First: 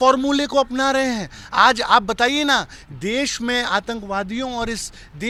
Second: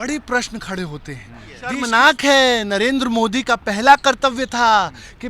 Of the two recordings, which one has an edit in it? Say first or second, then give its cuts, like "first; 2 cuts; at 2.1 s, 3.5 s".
second; 1 cut; at 1.8 s